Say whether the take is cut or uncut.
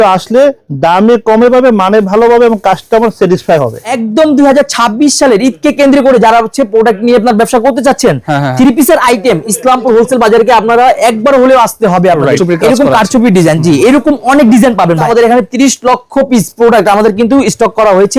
cut